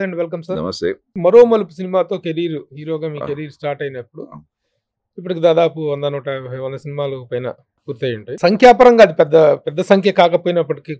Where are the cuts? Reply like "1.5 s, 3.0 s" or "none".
1.0 s, 8.3 s